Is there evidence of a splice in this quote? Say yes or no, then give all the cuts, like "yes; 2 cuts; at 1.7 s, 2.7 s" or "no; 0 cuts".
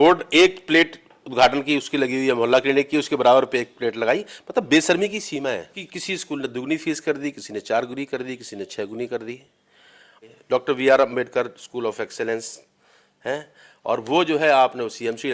yes; 2 cuts; at 5.7 s, 10.3 s